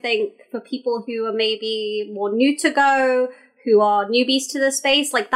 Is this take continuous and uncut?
yes; 0 cuts

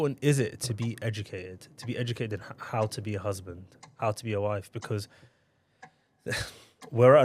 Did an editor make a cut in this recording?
no; 0 cuts

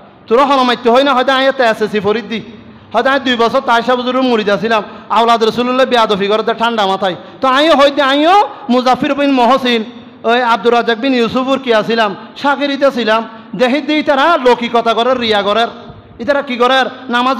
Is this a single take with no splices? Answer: yes; 0 cuts

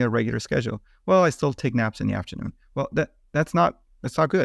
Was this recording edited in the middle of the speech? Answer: no; 0 cuts

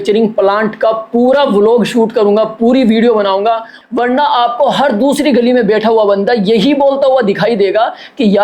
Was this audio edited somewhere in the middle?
yes; 1 cut; at 3.8 s

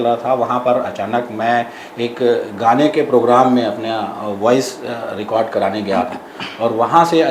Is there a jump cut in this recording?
no; 0 cuts

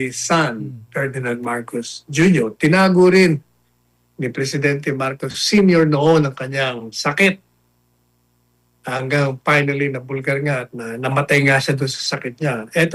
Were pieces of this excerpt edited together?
no; 0 cuts

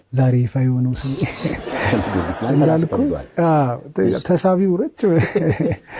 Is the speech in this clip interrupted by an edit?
no; 0 cuts

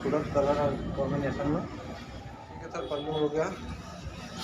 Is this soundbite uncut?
no; 1 cut; at 2.6 s

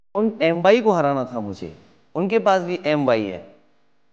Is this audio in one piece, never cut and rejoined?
yes; 0 cuts

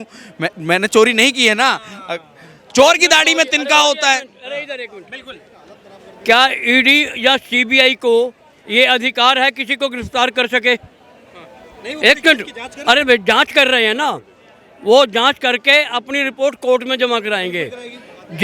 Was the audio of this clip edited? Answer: no; 0 cuts

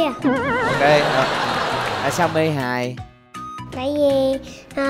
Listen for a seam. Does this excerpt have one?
yes; 1 cut; at 2.1 s

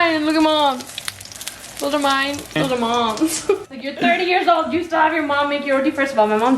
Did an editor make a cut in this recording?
yes; 2 cuts; at 2.5 s, 3.7 s

